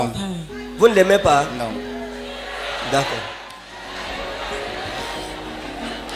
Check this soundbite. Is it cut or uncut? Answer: cut